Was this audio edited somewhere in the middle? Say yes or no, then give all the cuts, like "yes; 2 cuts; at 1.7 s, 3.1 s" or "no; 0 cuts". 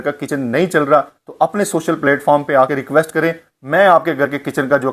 no; 0 cuts